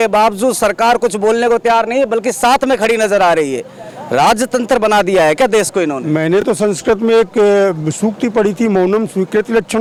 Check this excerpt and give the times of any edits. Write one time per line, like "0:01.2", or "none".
none